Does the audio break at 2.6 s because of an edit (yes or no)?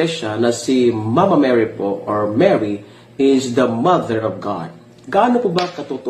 yes